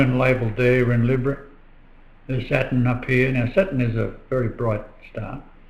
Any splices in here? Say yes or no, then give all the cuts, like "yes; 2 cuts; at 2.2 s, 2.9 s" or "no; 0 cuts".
no; 0 cuts